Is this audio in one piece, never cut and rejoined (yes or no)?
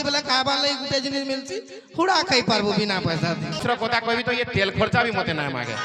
no